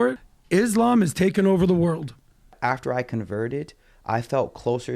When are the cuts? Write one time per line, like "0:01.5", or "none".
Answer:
0:02.5